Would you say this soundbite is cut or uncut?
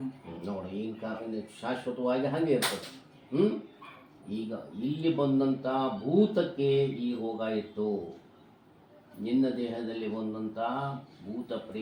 uncut